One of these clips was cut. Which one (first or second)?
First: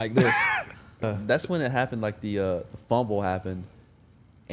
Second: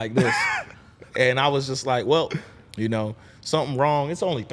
first